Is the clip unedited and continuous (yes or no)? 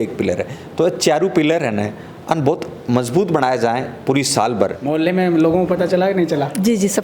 no